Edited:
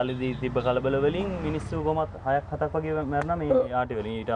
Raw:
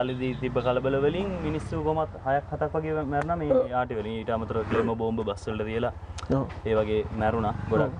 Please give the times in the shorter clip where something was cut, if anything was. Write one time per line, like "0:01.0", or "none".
none